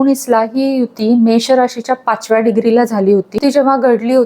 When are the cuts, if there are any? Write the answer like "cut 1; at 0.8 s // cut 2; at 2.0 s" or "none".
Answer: cut 1; at 3.4 s

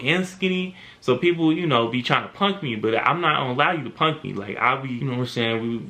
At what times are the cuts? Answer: cut 1; at 5.0 s

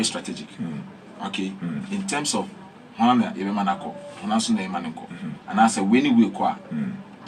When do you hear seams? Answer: none

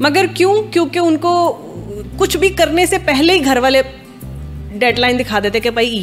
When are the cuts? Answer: none

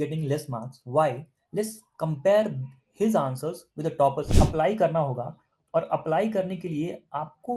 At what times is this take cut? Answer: cut 1; at 4.3 s

